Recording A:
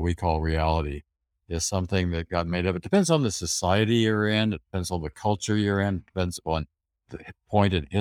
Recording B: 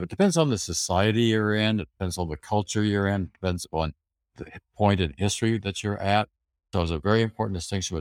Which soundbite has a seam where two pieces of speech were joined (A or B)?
B